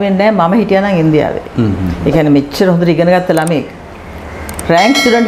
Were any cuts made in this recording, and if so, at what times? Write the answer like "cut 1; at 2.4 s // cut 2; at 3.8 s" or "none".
none